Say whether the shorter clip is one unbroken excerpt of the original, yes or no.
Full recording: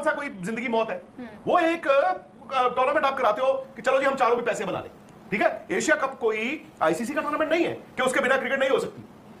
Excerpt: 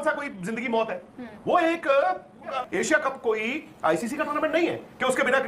no